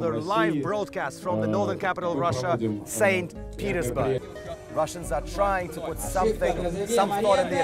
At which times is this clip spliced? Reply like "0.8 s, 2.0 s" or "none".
4.2 s

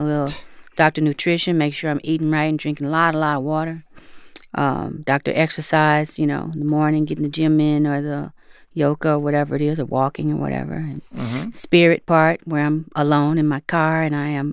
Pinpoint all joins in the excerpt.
none

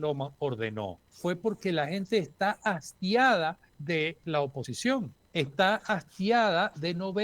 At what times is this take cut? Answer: 1.0 s, 3.7 s, 4.8 s

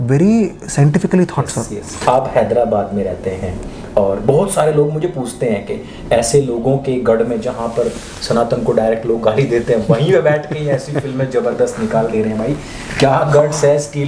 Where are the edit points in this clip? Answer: 1.9 s

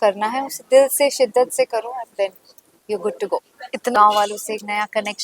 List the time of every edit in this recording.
4.0 s

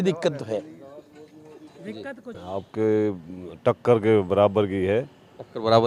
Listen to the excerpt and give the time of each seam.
2.3 s

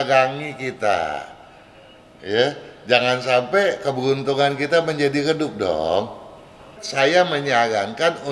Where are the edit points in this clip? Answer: 6.8 s

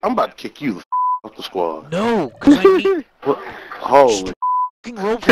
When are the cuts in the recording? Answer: none

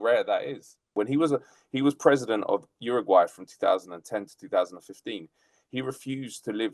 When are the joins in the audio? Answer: 0.9 s

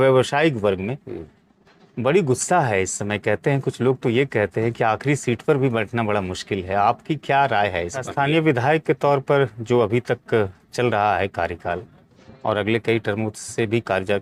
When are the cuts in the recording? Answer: 8.0 s

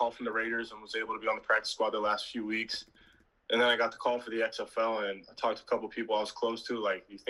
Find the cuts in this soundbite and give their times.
none

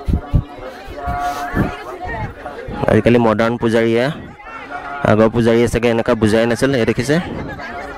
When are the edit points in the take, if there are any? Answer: none

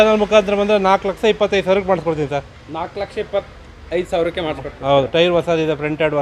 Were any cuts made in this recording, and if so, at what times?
none

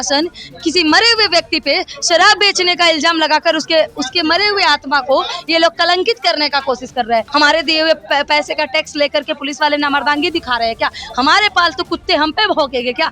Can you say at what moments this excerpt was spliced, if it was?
7.3 s

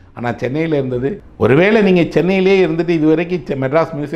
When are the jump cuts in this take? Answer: 1.2 s

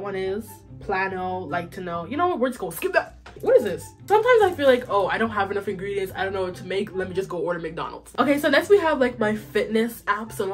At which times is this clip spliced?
3.8 s, 8.1 s

